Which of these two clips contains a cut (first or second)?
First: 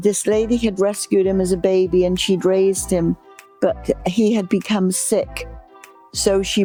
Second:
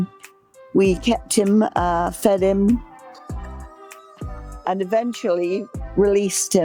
second